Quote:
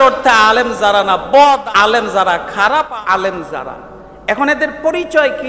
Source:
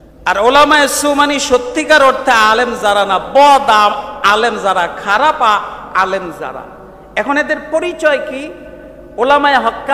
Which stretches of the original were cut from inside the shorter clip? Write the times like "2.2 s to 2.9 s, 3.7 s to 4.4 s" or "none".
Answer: 3.6 s to 4.1 s, 5.4 s to 5.8 s